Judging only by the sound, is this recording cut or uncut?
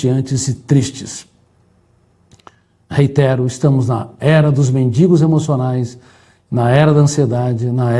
uncut